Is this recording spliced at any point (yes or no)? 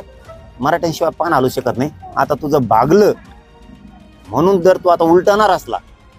no